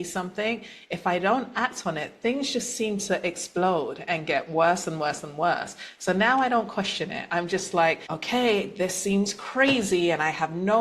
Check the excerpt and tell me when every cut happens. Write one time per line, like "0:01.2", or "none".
0:08.1